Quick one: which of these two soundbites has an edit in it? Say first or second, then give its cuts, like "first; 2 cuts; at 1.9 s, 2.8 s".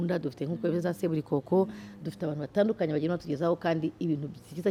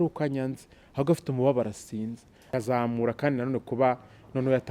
second; 1 cut; at 2.5 s